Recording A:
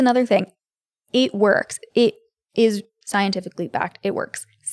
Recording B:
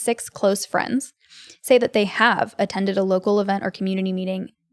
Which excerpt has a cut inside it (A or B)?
A